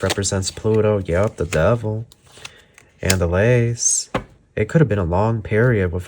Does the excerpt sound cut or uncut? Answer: uncut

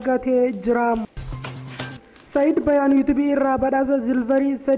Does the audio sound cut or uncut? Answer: cut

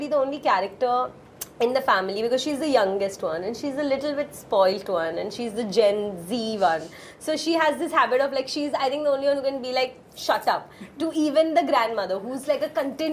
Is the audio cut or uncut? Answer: uncut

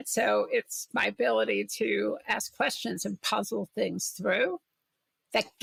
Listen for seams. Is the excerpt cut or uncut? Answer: uncut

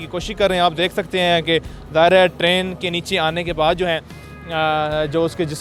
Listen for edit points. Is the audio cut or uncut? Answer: uncut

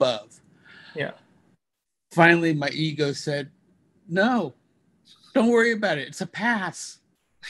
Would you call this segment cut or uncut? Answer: uncut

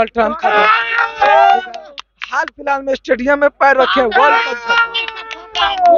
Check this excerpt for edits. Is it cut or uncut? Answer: uncut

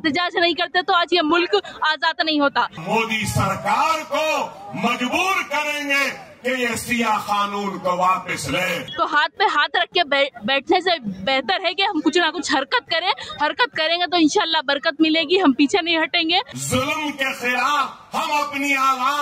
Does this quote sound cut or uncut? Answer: cut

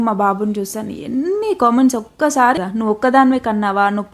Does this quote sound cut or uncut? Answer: cut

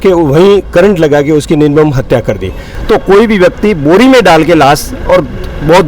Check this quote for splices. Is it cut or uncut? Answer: cut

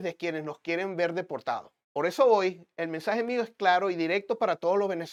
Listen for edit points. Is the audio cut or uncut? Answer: uncut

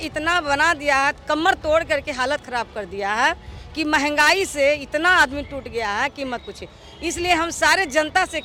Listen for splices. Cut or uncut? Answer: uncut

